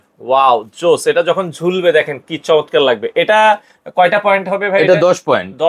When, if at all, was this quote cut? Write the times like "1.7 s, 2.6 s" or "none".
none